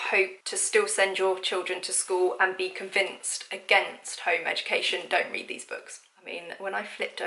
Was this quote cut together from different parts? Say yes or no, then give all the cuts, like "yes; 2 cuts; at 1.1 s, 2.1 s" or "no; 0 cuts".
yes; 1 cut; at 6.2 s